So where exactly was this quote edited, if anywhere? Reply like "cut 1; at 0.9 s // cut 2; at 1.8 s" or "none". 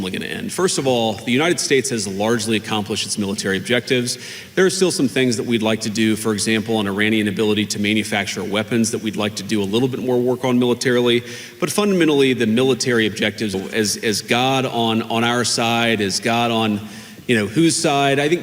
cut 1; at 13.5 s